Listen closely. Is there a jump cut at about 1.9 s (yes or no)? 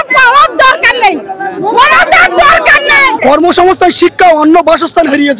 no